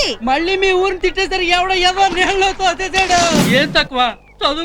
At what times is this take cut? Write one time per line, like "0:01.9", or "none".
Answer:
0:03.5